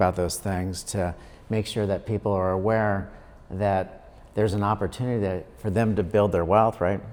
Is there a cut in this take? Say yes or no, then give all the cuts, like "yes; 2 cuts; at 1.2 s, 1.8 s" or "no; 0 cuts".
no; 0 cuts